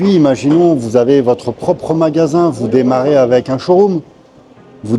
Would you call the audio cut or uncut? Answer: uncut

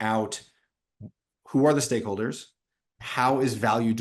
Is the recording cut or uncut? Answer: uncut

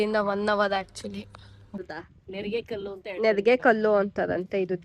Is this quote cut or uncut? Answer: cut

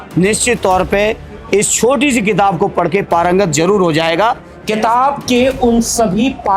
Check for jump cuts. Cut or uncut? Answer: cut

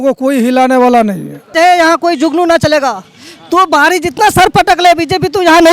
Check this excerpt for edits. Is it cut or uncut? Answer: cut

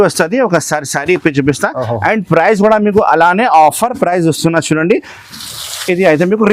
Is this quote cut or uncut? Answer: uncut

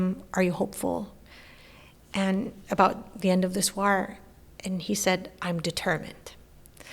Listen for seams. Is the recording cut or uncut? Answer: uncut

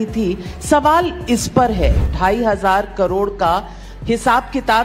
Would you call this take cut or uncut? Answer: cut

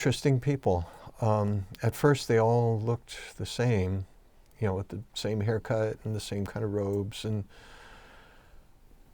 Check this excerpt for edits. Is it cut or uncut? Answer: uncut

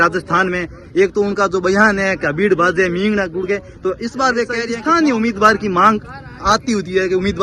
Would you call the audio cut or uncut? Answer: cut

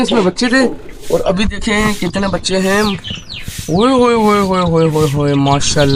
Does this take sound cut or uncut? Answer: uncut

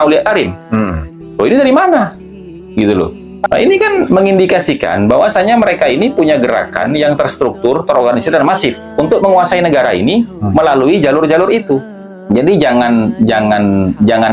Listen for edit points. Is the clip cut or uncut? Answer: cut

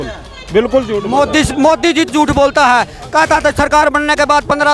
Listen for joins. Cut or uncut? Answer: cut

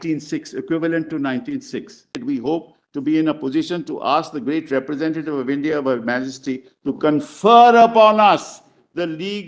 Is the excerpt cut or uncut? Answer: cut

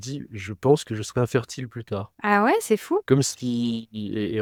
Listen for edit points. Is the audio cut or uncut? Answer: uncut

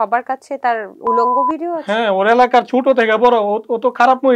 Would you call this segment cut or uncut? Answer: cut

